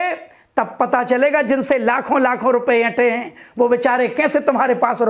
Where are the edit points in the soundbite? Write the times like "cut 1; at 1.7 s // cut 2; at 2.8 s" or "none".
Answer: none